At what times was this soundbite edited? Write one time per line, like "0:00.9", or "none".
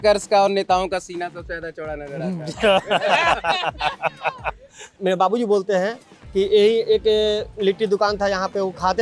0:04.9